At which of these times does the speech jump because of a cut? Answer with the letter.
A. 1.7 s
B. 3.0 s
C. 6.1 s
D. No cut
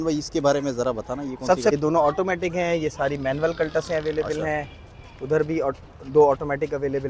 A